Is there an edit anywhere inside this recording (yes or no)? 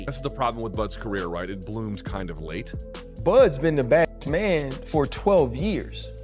yes